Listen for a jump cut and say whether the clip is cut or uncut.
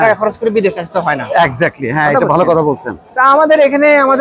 uncut